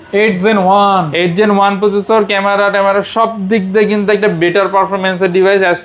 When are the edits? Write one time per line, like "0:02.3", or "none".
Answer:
none